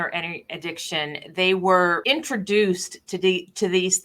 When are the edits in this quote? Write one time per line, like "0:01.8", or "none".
0:02.0

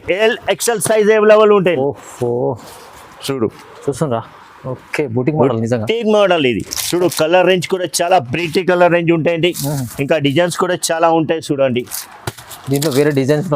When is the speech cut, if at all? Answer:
0:01.8

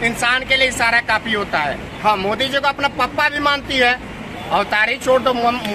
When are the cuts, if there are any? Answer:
0:01.9

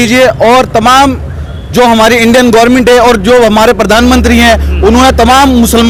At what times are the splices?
none

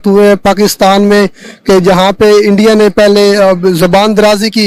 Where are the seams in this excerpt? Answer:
none

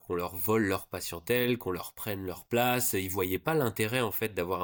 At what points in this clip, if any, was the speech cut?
none

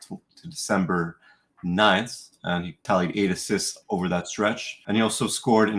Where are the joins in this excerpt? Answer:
0:02.8
0:04.7

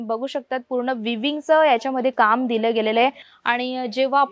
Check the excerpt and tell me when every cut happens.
0:03.3

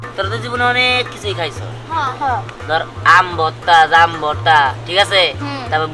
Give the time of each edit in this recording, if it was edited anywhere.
none

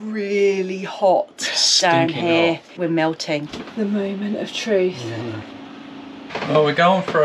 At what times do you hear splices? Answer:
0:06.3

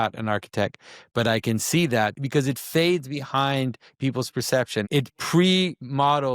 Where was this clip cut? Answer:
0:02.2
0:04.8

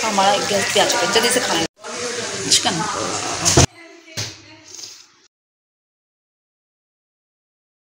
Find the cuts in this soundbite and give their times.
none

